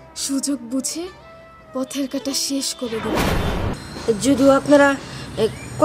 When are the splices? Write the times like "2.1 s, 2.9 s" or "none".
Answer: 3.7 s